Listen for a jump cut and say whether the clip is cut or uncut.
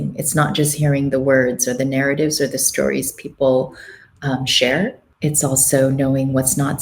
cut